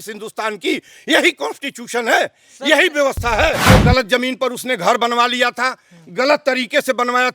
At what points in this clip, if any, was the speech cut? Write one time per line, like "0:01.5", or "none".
0:03.7